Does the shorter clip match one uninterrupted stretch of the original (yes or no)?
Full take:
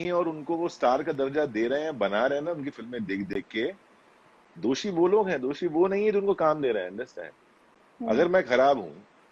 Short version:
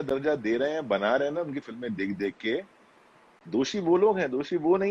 yes